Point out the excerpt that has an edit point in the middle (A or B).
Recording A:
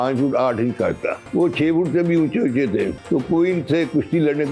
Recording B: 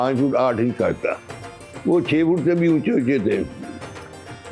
A